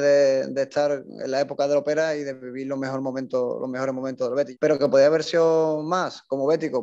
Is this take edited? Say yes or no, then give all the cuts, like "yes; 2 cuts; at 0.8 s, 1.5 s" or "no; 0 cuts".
yes; 1 cut; at 4.5 s